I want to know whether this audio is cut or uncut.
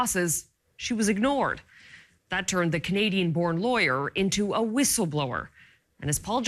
cut